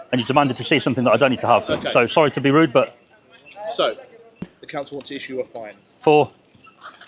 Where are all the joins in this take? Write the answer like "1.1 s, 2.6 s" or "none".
4.5 s